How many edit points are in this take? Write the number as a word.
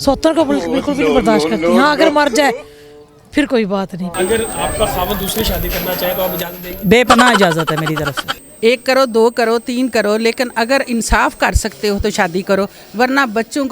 two